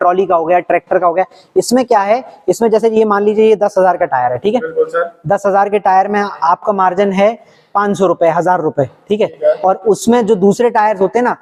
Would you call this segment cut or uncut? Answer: uncut